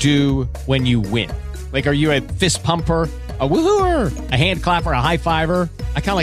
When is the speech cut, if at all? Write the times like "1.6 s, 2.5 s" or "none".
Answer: none